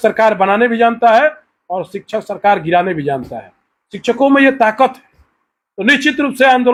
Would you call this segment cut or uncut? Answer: uncut